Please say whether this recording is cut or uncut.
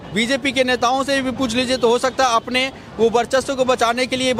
uncut